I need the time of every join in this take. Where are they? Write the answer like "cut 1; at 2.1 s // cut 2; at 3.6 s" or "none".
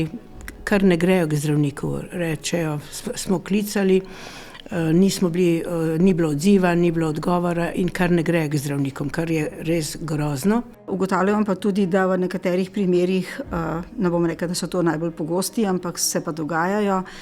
cut 1; at 10.9 s